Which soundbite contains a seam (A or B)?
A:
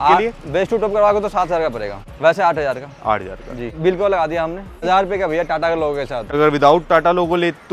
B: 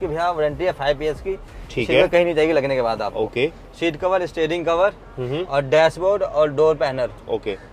A